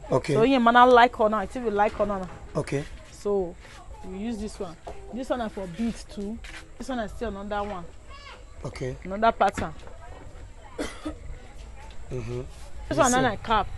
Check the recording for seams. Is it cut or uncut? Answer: cut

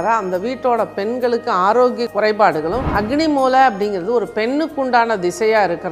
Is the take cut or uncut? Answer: cut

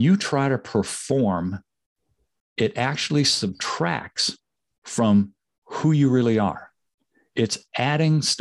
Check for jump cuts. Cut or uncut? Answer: uncut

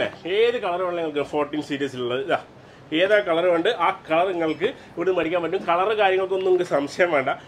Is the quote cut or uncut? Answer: uncut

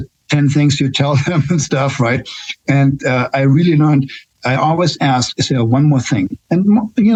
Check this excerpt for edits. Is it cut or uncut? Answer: uncut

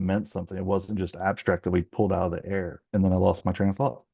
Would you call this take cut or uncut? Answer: uncut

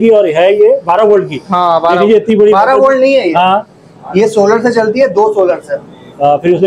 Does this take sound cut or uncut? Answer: uncut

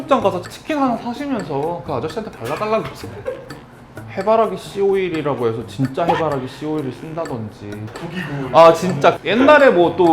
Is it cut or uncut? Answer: cut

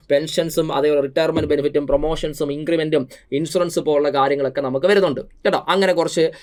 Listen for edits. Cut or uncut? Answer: uncut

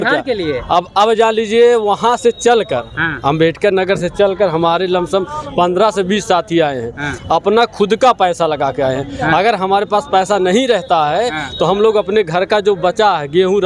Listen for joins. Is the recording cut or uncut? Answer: uncut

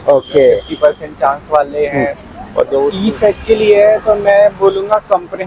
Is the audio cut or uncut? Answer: cut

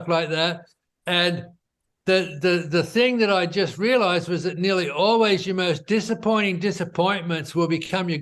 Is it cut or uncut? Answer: uncut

